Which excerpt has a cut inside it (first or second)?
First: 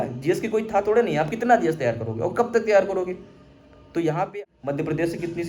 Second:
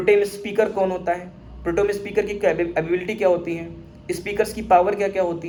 first